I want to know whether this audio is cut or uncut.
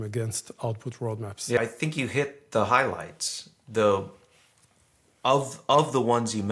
cut